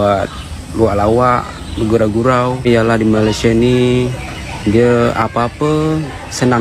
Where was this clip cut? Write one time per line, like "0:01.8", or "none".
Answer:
0:02.6